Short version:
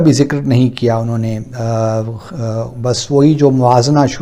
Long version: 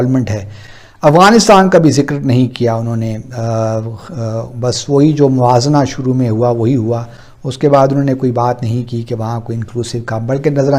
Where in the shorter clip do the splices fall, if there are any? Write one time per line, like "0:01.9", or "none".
none

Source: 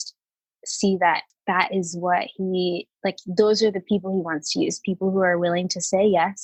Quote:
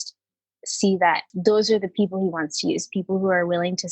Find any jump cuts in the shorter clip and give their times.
0:01.3

